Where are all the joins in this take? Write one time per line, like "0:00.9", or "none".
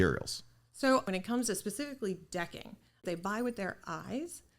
0:01.1
0:03.0